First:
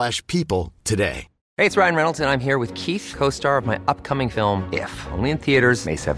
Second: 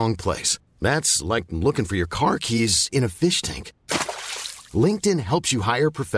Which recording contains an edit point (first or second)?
first